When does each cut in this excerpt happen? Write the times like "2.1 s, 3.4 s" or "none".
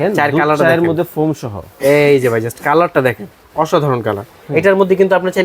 4.3 s

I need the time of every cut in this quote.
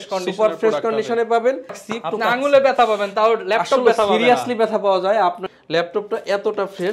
1.9 s, 5.4 s

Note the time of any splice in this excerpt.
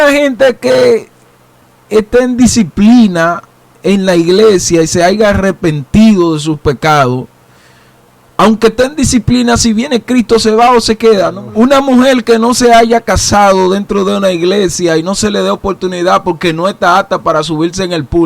11.4 s

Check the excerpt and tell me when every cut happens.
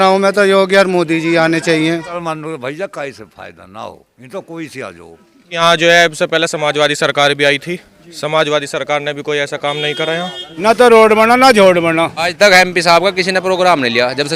2.1 s, 5.5 s, 10.4 s, 12.3 s

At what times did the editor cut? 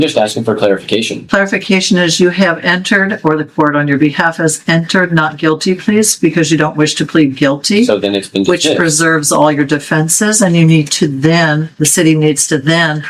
none

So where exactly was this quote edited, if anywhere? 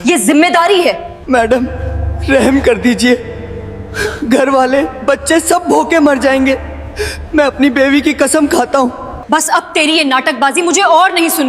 1.2 s, 9.2 s

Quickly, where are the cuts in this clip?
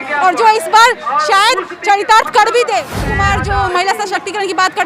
3.0 s

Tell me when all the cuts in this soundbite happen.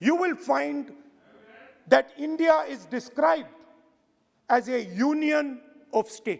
none

